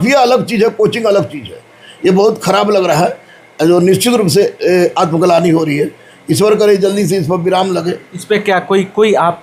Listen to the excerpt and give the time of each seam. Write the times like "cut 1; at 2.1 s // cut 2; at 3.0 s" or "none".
none